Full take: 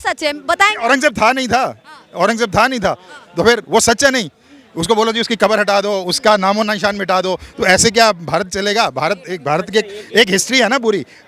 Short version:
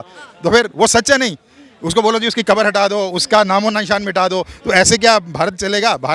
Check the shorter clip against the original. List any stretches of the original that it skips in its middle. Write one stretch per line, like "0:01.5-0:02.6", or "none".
none